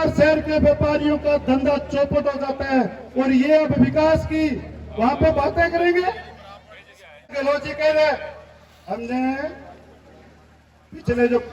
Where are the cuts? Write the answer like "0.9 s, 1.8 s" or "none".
7.3 s

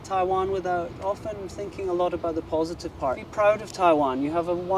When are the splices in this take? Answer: 3.2 s

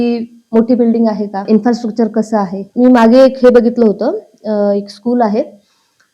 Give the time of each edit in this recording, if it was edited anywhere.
1.4 s, 2.6 s

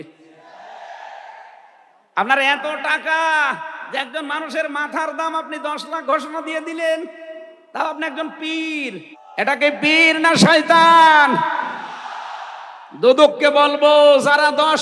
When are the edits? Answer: 9.1 s

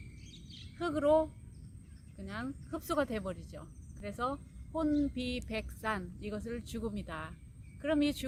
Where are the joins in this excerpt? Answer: none

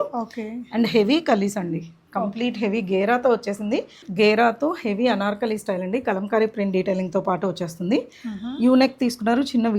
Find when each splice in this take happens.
4.1 s

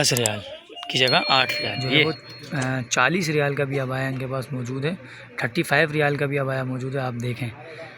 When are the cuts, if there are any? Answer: 2.0 s

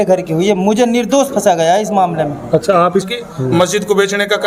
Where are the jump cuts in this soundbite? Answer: 3.0 s

